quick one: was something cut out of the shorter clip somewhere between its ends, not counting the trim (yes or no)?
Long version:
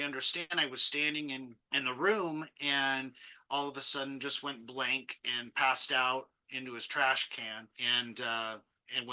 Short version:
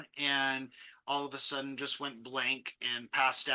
no